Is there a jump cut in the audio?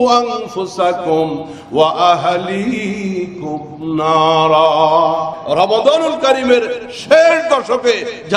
yes; 1 cut; at 5.4 s

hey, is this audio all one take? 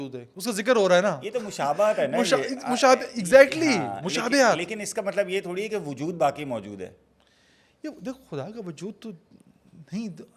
yes; 0 cuts

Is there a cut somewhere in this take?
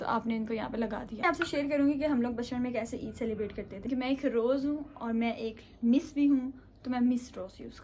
yes; 2 cuts; at 1.2 s, 3.9 s

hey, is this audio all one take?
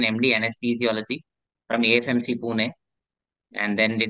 yes; 0 cuts

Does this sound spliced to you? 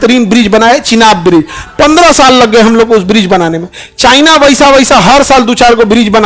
no; 0 cuts

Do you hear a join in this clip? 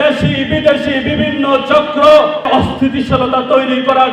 yes; 1 cut; at 2.5 s

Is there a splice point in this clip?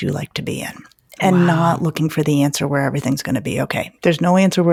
no; 0 cuts

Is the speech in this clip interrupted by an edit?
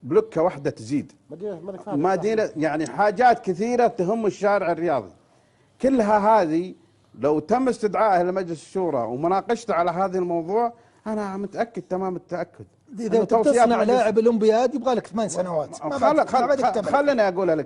yes; 1 cut; at 13.6 s

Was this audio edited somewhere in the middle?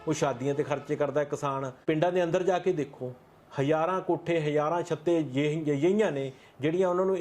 yes; 1 cut; at 1.7 s

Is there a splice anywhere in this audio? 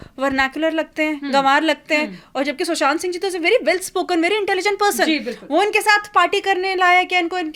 no; 0 cuts

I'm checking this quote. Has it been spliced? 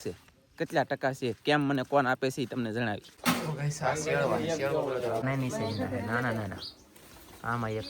yes; 2 cuts; at 3.1 s, 5.2 s

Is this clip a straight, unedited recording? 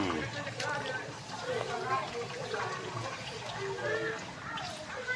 yes; 0 cuts

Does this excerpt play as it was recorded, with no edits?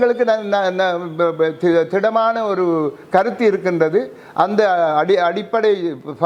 yes; 0 cuts

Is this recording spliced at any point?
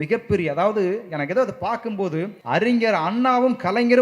yes; 1 cut; at 2.4 s

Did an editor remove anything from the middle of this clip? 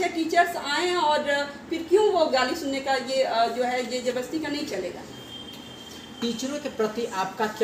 no; 0 cuts

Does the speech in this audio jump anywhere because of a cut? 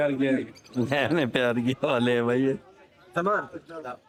no; 0 cuts

